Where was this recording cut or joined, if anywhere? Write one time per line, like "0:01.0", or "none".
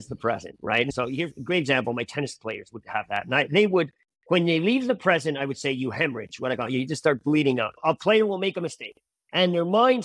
0:00.9